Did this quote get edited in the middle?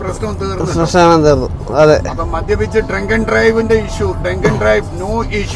no; 0 cuts

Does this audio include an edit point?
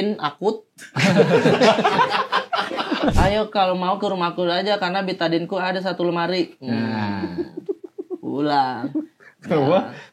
yes; 1 cut; at 3.1 s

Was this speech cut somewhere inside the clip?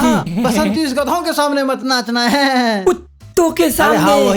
no; 0 cuts

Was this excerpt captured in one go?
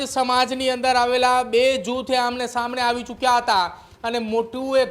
yes; 0 cuts

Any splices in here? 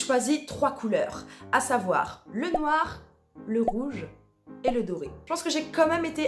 no; 0 cuts

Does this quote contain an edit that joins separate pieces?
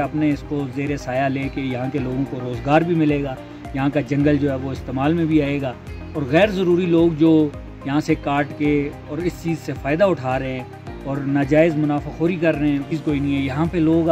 no; 0 cuts

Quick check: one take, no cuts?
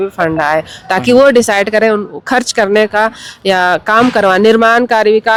yes; 0 cuts

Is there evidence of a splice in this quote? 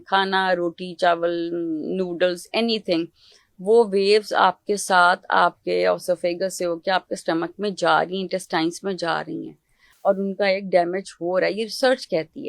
no; 0 cuts

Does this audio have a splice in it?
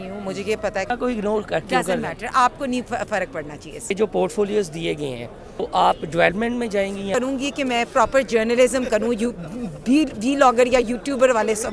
yes; 4 cuts; at 0.9 s, 3.9 s, 5.7 s, 7.2 s

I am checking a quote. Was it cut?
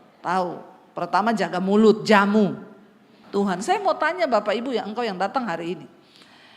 yes; 1 cut; at 3.6 s

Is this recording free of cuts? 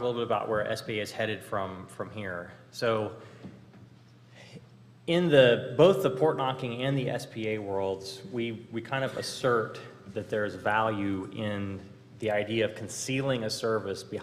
no; 1 cut; at 4.6 s

